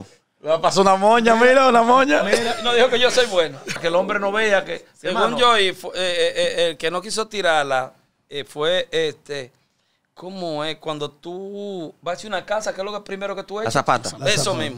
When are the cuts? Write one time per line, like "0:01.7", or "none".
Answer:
0:03.8